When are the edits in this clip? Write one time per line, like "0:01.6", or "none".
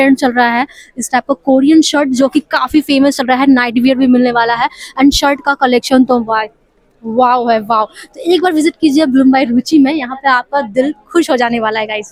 none